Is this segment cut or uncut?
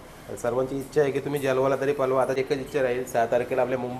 cut